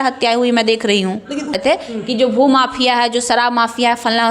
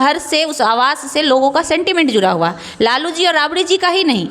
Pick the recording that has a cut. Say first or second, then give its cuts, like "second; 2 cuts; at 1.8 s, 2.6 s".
first; 1 cut; at 1.6 s